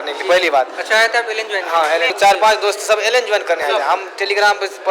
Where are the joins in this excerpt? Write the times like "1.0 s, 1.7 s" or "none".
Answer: 2.1 s